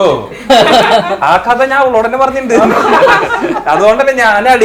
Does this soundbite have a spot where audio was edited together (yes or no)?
no